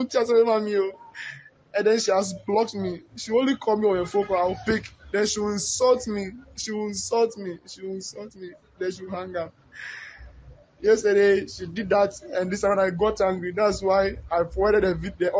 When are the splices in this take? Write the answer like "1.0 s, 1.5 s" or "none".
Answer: none